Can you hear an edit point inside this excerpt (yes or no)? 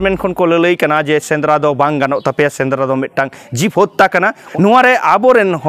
yes